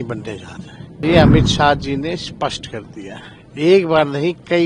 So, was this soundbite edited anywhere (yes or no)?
yes